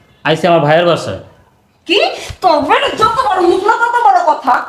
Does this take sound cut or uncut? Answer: uncut